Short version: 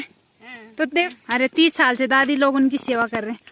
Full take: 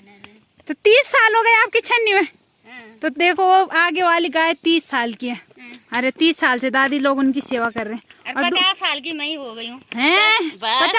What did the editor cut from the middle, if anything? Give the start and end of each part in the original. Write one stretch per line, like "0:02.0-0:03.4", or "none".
0:03.3-0:05.7